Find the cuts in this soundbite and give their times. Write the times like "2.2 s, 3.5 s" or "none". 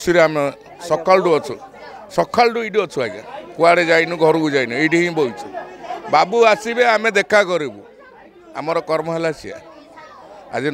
none